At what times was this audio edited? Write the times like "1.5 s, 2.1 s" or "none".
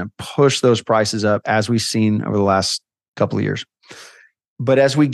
none